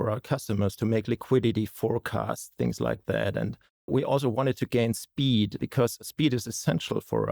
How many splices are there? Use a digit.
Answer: 1